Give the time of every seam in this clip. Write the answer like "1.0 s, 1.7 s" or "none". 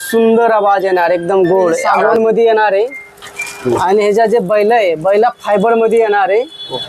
2.0 s